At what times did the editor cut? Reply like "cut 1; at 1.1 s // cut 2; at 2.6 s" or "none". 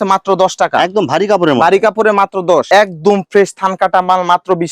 cut 1; at 2.7 s